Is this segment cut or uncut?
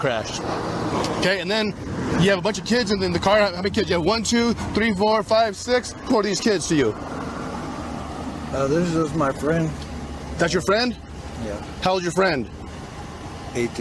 uncut